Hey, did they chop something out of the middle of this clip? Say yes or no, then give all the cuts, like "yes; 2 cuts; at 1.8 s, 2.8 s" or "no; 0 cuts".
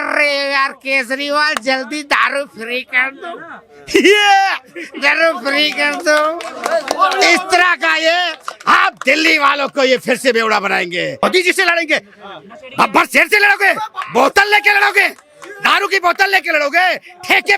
yes; 1 cut; at 11.2 s